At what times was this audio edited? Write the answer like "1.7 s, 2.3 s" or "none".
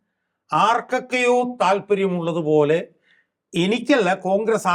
none